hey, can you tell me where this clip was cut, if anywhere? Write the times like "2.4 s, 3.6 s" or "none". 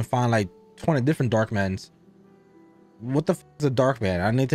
none